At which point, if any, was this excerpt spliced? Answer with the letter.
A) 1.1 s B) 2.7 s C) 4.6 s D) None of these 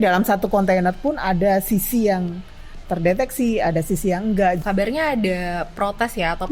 C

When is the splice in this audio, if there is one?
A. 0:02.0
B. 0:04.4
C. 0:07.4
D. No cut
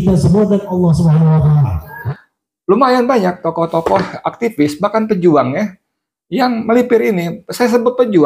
A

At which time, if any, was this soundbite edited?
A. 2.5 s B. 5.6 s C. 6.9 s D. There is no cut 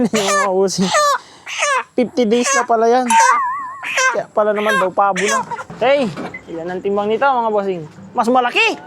B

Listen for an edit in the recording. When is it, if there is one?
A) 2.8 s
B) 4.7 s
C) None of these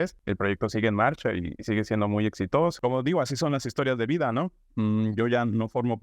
A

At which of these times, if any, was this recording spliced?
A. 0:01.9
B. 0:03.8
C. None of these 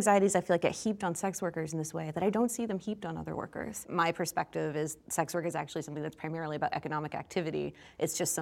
B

